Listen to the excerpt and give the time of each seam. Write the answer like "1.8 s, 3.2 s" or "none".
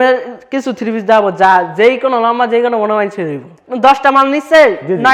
3.7 s